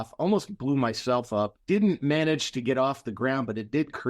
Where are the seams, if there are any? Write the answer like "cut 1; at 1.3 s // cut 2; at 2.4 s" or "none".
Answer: cut 1; at 1.6 s